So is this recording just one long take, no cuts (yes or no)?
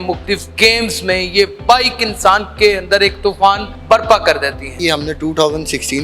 no